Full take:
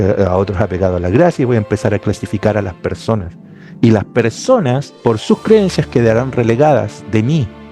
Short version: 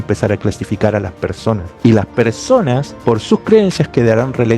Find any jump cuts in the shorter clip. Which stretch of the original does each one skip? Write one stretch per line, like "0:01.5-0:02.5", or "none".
0:03.3-0:03.7